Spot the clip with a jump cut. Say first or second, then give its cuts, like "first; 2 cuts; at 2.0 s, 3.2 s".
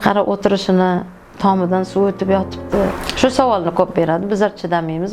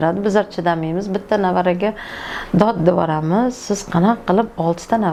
first; 1 cut; at 3.0 s